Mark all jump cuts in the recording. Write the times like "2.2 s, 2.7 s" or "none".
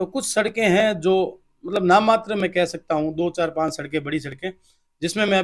none

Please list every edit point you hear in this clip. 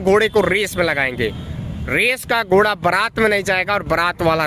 none

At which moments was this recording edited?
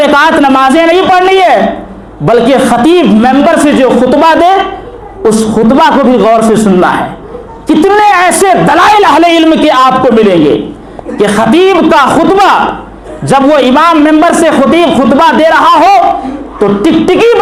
none

